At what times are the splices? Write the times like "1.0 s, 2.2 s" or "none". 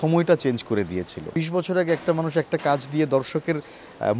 1.4 s